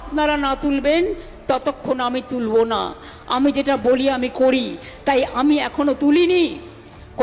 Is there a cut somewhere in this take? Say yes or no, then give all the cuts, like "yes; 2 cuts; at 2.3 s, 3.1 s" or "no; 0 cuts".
no; 0 cuts